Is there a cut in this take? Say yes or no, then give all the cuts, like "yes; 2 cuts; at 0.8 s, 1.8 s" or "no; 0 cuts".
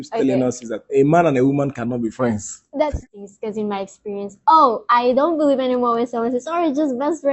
yes; 1 cut; at 3.0 s